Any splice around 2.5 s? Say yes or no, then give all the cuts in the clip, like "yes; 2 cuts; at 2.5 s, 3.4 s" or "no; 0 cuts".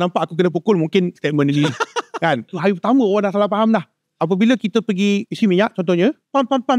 yes; 1 cut; at 2.5 s